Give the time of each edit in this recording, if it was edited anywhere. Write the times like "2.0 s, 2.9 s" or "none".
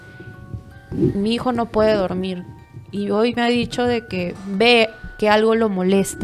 none